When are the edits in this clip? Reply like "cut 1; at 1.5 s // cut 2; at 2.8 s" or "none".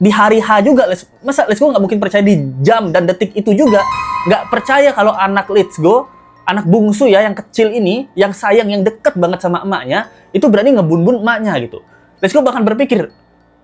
none